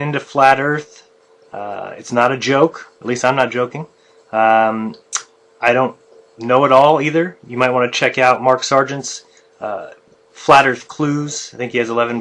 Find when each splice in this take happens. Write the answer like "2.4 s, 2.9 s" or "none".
5.9 s